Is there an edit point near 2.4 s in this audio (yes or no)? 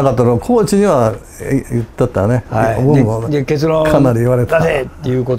no